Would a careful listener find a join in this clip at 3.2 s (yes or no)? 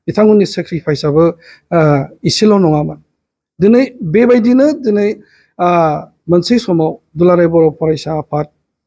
no